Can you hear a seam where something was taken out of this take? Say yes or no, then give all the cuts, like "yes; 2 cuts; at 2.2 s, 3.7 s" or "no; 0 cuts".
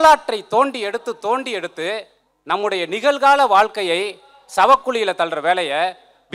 no; 0 cuts